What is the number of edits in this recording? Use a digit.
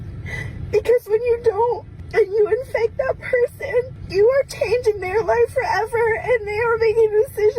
2